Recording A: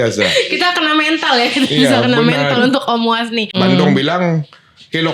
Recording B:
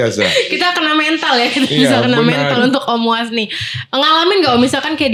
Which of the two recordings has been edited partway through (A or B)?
A